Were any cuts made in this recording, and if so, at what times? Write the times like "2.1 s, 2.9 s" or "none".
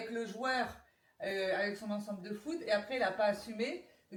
none